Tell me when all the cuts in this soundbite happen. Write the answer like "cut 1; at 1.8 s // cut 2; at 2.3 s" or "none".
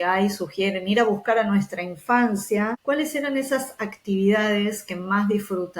cut 1; at 2.8 s